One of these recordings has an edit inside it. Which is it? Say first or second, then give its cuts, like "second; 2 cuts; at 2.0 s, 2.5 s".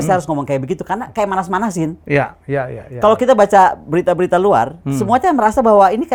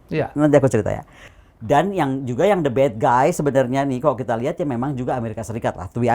second; 1 cut; at 1.3 s